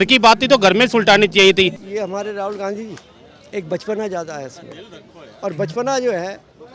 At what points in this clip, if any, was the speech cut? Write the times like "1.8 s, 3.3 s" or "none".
1.8 s